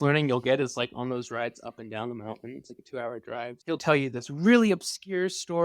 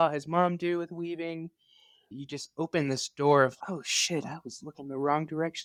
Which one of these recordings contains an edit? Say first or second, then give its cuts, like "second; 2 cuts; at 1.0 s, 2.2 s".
first; 1 cut; at 3.7 s